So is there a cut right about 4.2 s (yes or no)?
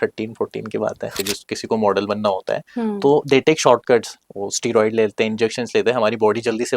no